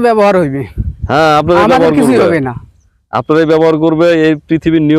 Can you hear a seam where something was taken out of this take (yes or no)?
no